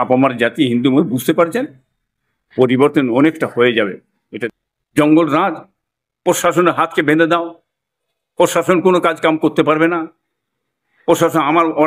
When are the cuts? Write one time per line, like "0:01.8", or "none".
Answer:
0:04.3